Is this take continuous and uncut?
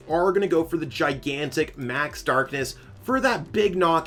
yes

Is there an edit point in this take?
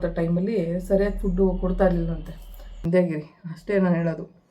yes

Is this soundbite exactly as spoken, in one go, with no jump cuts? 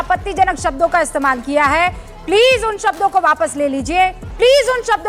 yes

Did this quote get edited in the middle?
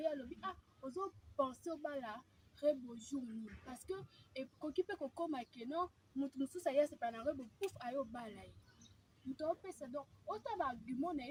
no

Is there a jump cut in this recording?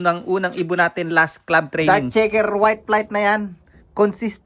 yes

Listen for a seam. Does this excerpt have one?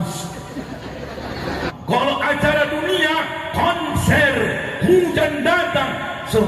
yes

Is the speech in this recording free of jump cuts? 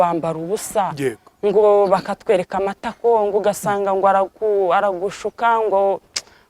yes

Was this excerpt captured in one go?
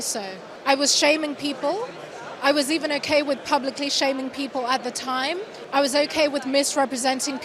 yes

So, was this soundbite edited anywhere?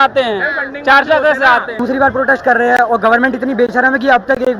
yes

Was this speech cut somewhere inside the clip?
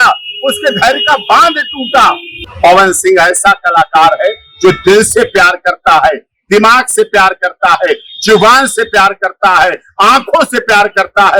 yes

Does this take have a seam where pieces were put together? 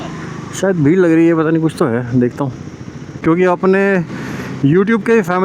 yes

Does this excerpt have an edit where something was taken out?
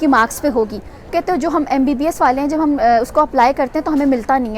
yes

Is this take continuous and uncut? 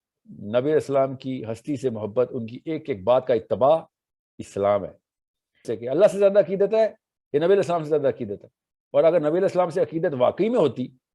no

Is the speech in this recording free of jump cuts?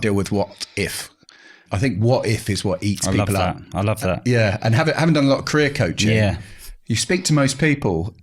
no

